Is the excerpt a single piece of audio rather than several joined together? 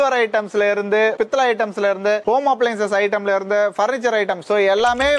yes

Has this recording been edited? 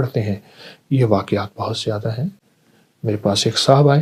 no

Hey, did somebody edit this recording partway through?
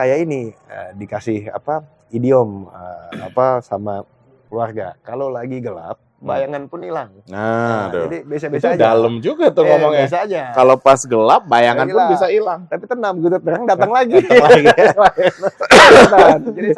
no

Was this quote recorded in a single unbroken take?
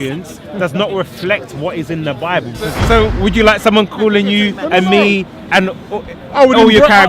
no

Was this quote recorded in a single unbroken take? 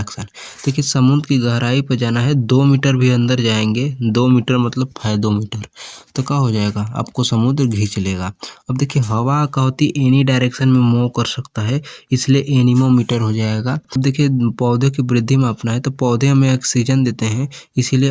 no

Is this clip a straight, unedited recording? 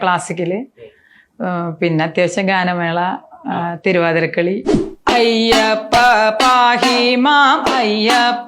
no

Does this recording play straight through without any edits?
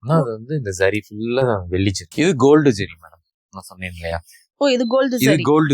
no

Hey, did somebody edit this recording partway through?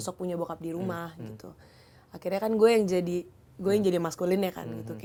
no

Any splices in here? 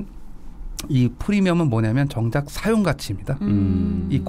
no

